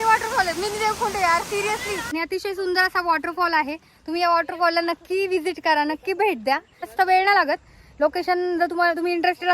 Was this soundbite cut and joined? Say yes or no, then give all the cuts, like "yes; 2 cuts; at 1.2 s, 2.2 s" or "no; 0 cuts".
yes; 2 cuts; at 2.0 s, 6.9 s